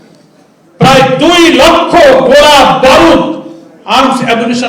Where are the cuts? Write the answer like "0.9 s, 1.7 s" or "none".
none